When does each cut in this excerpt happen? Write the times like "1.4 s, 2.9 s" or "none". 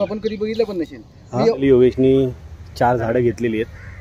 1.6 s

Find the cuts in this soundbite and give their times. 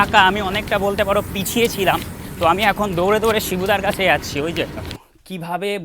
4.9 s

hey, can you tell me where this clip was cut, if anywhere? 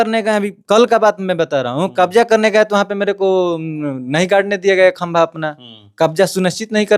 none

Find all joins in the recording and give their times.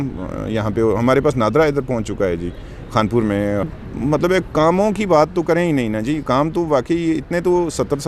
3.7 s

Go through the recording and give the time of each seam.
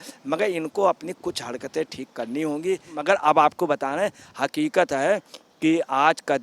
2.9 s

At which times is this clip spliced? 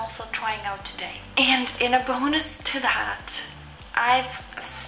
1.2 s

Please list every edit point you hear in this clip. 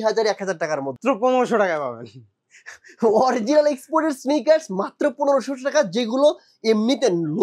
1.0 s

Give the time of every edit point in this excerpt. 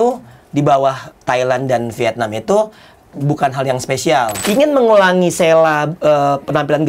1.1 s, 3.0 s, 4.4 s

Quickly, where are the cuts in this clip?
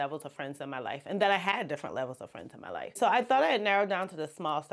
3.0 s

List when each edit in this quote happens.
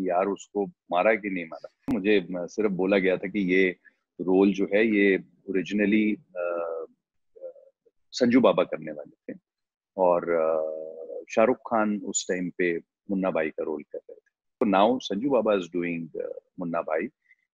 1.9 s, 14.5 s

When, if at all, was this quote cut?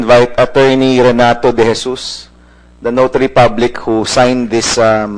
3.8 s

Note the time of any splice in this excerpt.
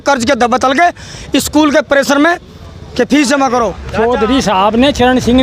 3.8 s

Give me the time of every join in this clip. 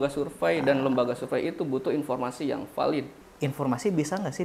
3.3 s

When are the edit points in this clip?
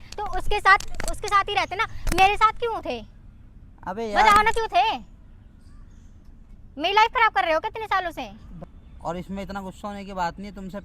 9.0 s

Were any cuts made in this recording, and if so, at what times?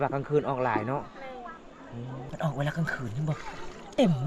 2.3 s

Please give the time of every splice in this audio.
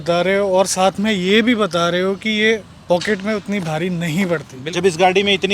4.6 s

